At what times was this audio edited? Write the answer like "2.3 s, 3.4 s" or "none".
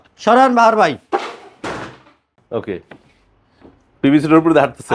2.4 s